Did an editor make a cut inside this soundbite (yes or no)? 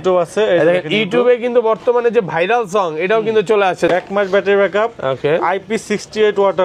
yes